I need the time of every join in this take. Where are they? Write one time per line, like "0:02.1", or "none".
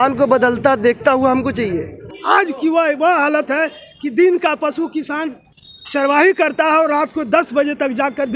0:02.0